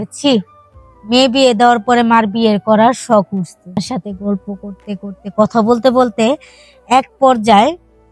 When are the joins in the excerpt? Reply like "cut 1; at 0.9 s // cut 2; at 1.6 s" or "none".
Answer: cut 1; at 3.8 s